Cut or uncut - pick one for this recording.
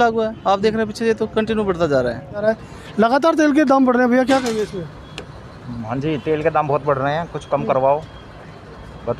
cut